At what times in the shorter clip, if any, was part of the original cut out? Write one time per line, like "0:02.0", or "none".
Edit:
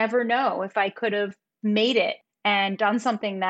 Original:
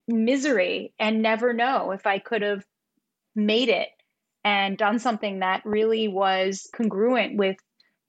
0:01.4
0:02.3

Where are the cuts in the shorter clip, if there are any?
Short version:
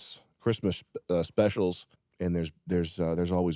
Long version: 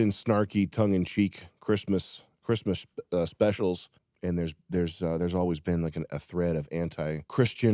none

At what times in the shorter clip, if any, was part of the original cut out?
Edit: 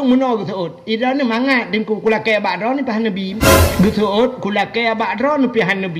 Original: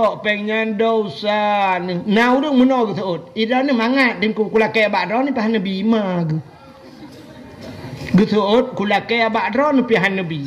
0:03.3

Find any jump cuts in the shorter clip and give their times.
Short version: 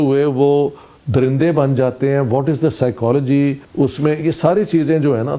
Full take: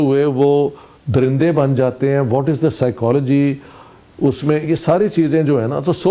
0:03.6

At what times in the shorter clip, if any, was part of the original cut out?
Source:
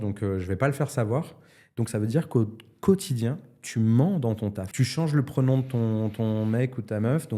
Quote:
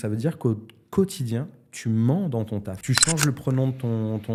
none

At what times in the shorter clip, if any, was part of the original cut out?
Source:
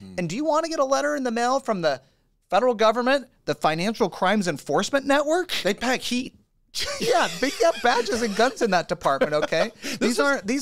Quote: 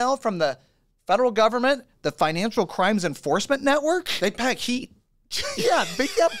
none

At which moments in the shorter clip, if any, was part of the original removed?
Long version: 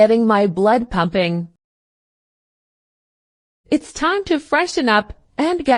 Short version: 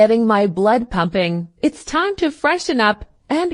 0:01.5

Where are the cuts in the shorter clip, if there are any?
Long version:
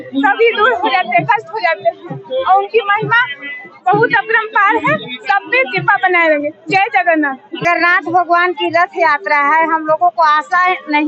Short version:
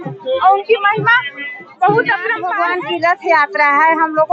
0:02.4

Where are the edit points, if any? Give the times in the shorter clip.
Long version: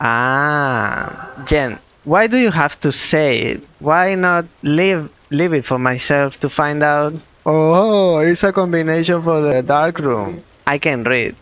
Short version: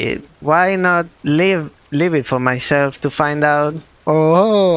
none

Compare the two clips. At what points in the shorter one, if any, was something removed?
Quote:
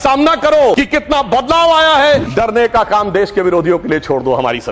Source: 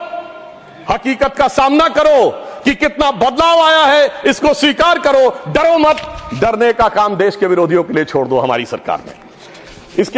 0:00.8
0:02.3

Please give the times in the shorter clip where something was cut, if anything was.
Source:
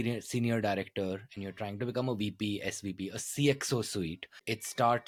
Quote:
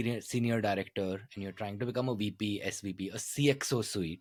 none

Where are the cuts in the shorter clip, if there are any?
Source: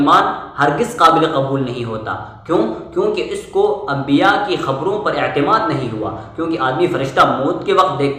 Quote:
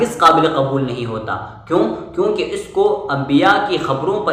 none

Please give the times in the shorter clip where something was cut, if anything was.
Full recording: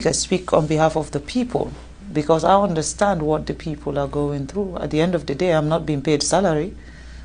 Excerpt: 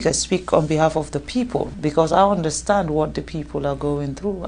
0:01.7

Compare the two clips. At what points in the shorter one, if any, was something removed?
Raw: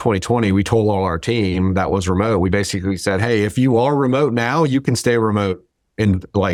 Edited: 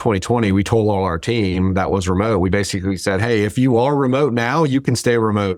none

